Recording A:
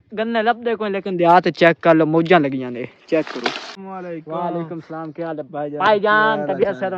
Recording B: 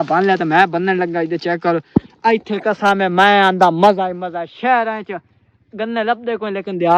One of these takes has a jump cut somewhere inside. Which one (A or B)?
A